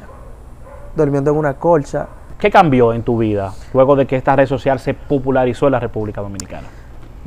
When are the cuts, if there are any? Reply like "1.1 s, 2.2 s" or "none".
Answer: 2.3 s